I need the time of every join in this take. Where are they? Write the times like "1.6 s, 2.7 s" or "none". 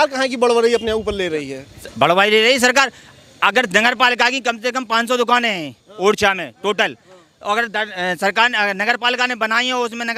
none